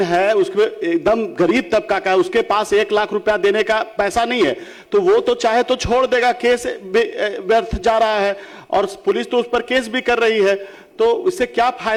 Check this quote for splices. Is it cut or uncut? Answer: uncut